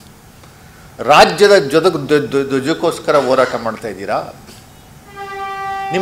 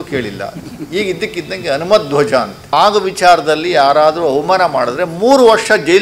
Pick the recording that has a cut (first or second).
second